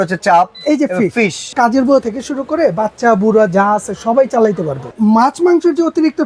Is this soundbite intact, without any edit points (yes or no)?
no